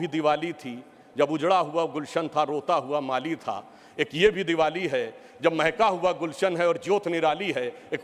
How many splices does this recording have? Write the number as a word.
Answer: zero